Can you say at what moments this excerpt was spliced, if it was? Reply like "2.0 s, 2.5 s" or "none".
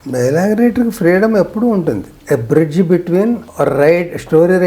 2.1 s, 3.5 s